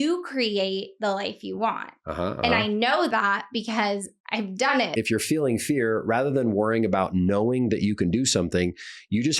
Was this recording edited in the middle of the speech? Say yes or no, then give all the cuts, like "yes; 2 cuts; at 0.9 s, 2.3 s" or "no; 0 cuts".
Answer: yes; 1 cut; at 4.9 s